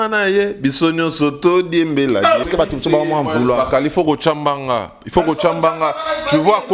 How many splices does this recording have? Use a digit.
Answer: 1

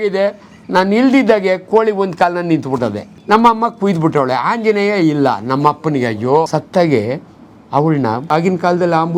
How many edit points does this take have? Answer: 3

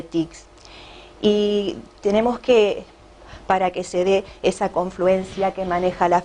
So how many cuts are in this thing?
0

